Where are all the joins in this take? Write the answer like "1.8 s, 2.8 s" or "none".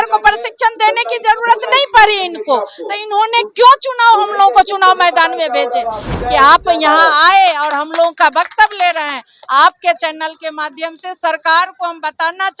6.0 s